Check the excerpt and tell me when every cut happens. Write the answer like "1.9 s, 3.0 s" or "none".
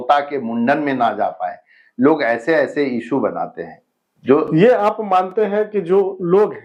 none